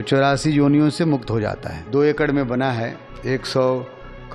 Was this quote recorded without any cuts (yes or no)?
no